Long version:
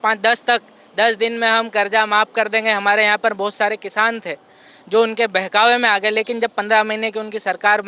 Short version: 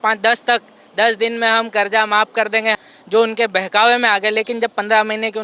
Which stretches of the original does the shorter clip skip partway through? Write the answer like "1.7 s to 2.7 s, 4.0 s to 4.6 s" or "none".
2.8 s to 4.6 s